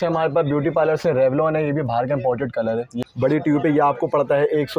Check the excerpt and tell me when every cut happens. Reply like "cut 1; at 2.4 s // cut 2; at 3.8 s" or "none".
cut 1; at 2.9 s